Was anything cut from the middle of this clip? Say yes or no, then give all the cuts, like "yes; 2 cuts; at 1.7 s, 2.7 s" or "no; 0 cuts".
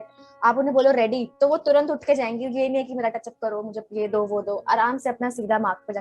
yes; 1 cut; at 1.2 s